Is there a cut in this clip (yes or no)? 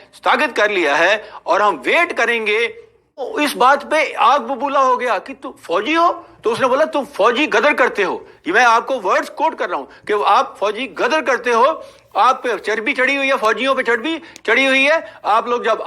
yes